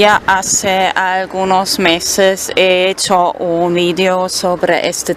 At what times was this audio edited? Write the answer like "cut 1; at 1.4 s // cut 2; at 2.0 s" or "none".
cut 1; at 2.9 s